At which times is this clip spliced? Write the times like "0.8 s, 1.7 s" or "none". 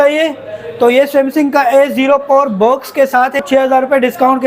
3.4 s